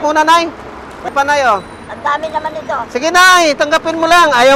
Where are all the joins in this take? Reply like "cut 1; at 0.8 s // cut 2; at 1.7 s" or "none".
cut 1; at 1.1 s